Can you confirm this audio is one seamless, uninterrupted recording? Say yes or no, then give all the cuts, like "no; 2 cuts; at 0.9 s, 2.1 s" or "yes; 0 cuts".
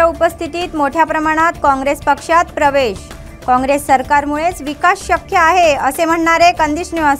yes; 0 cuts